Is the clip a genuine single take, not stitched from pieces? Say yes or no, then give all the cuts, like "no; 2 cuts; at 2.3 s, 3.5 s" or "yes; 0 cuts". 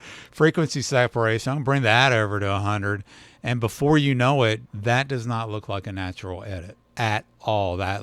no; 2 cuts; at 4.7 s, 6.8 s